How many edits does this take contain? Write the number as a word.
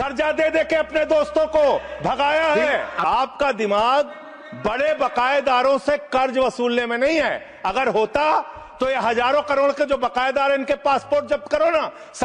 zero